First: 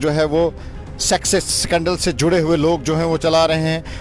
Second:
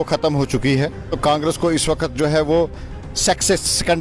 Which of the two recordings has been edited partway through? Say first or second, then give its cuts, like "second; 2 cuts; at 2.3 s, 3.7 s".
second; 1 cut; at 1.1 s